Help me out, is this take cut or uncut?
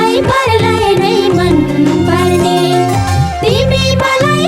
uncut